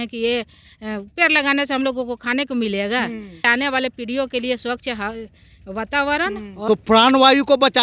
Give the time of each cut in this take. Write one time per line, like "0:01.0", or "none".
0:03.5
0:06.5